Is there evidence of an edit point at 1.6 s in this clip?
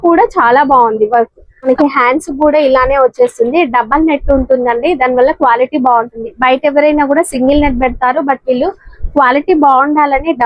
yes; 1 cut; at 1.6 s

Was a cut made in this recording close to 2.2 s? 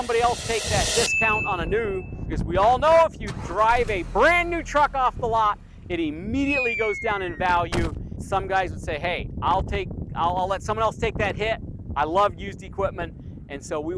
yes; 2 cuts; at 2.2 s, 8.2 s

